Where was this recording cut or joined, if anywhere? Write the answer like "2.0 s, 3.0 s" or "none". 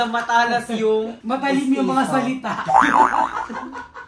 1.2 s